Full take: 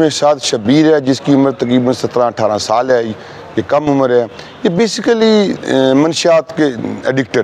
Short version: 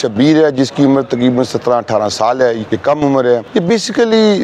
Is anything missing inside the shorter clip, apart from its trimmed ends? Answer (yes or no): yes